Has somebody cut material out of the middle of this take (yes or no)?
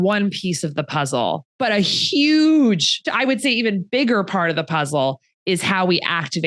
yes